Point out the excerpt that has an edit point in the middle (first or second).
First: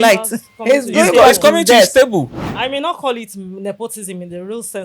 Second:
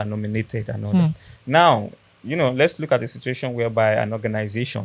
first